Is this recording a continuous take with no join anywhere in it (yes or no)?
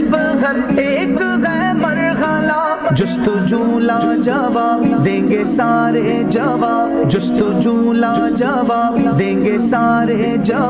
yes